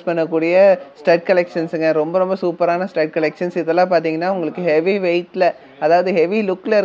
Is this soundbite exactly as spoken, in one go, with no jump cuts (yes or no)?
yes